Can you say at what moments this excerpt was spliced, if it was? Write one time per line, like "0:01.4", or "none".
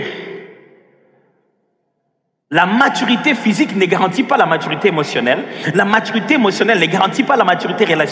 none